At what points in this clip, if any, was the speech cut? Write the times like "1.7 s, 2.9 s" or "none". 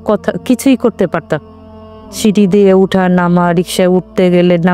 none